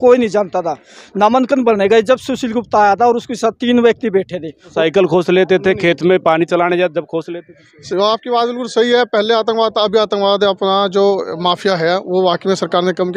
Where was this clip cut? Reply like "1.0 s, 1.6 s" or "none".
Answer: 4.7 s